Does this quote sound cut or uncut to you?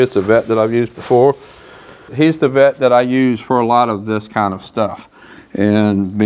cut